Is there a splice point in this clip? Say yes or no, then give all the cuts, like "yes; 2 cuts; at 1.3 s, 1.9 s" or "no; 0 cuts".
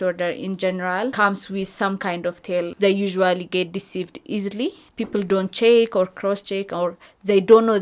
yes; 3 cuts; at 1.1 s, 2.7 s, 4.9 s